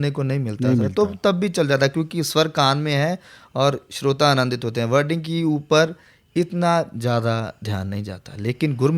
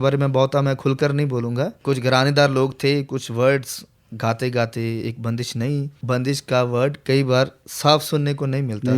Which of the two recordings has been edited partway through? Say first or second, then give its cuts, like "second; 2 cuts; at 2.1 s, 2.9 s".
second; 3 cuts; at 1.8 s, 5.9 s, 7.0 s